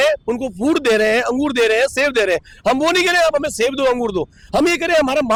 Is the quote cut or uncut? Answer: uncut